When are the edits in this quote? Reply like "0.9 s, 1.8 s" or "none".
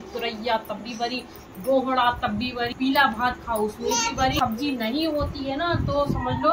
2.7 s, 4.4 s